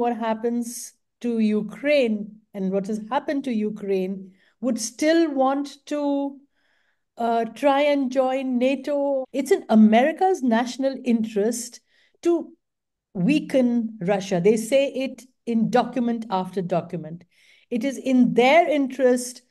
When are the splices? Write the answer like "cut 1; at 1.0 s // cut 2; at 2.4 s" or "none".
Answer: cut 1; at 9.2 s